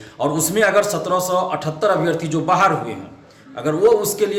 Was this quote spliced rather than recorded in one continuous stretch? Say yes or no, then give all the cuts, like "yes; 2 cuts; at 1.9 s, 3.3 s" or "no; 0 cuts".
no; 0 cuts